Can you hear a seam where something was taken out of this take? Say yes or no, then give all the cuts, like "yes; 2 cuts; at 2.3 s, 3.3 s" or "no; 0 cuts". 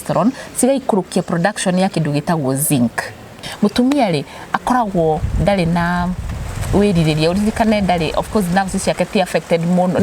yes; 1 cut; at 3.4 s